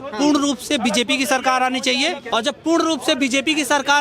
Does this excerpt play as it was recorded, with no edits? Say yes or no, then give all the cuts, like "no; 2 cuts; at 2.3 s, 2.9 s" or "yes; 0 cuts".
no; 1 cut; at 2.2 s